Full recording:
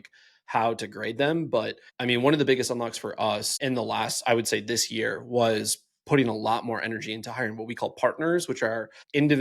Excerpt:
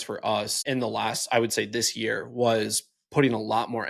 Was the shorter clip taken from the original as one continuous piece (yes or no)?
yes